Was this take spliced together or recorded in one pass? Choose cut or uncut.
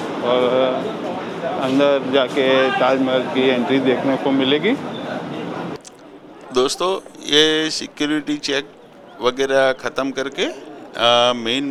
uncut